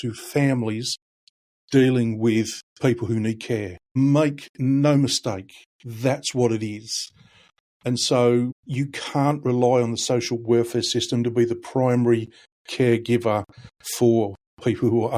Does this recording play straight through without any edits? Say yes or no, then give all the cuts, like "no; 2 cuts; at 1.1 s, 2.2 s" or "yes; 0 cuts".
no; 3 cuts; at 2.6 s, 3.8 s, 8.6 s